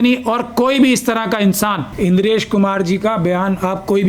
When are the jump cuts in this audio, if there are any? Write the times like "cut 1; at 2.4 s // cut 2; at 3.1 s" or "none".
cut 1; at 1.9 s